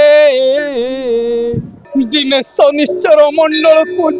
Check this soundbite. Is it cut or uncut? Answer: cut